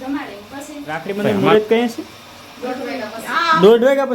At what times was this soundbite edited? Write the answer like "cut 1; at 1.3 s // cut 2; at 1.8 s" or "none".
cut 1; at 1.0 s